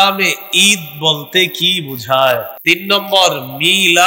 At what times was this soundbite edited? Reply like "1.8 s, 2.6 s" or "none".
2.5 s